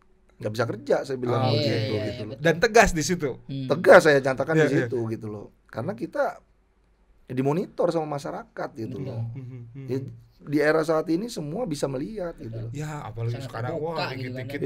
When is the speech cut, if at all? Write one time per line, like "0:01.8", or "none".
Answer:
none